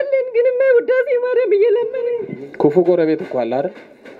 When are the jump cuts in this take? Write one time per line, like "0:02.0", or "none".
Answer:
0:02.2